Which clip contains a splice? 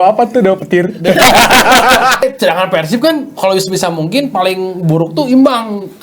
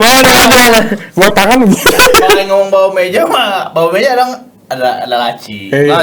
first; 1 cut; at 2.2 s

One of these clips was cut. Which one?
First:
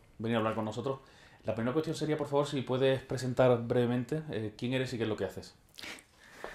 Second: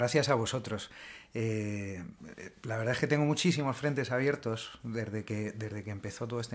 second; 1 cut; at 2.2 s

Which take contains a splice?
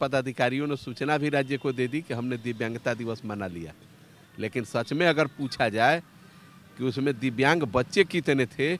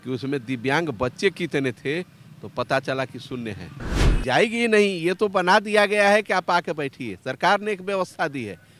second; 1 cut; at 4.0 s

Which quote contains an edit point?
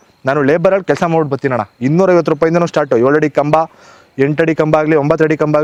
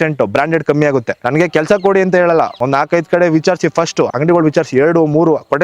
second; 3 cuts; at 1.2 s, 2.5 s, 4.1 s

